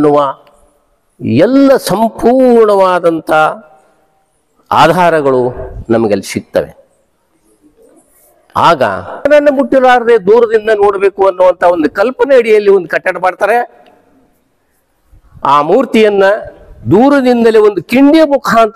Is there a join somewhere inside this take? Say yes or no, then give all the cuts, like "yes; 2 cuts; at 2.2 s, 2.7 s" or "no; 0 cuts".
yes; 1 cut; at 9.3 s